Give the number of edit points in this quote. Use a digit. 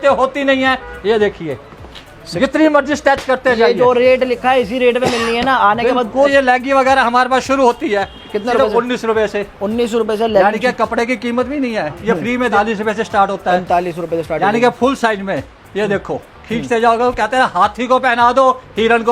2